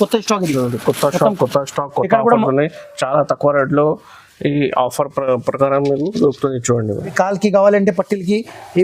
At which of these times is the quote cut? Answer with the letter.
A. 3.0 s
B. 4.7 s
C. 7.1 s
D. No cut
C